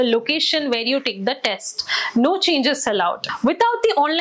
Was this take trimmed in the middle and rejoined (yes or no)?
yes